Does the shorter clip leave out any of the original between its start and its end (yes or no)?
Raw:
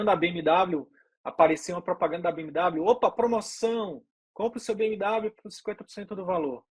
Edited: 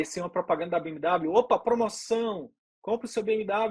no